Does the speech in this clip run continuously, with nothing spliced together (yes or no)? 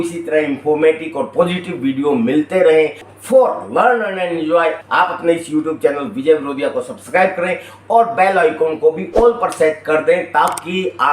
no